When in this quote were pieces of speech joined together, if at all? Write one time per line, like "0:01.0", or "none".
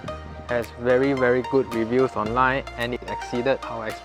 0:03.0